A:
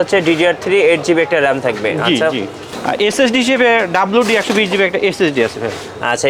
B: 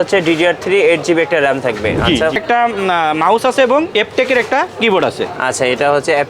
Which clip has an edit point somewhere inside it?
B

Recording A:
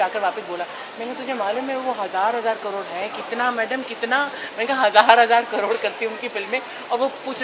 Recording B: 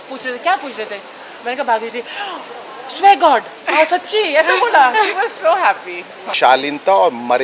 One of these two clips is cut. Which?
B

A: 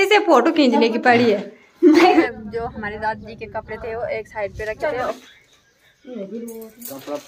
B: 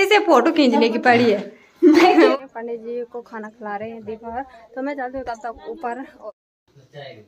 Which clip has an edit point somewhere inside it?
A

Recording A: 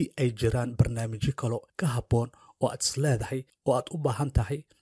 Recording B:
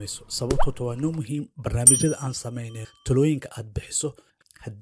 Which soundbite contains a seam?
A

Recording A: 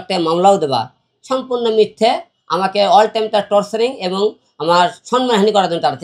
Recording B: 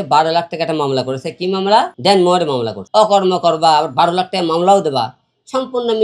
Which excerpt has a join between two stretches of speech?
B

